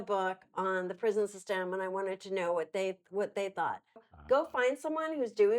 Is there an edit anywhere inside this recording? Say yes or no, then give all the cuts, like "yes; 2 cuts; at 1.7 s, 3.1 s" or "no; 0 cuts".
yes; 1 cut; at 4.1 s